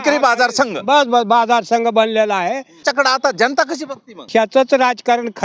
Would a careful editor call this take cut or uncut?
cut